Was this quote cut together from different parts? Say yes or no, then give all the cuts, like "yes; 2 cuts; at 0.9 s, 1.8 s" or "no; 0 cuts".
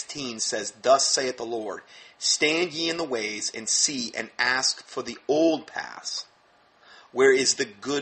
no; 0 cuts